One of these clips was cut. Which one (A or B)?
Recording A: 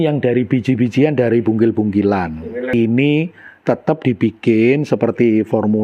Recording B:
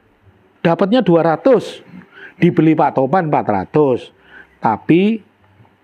A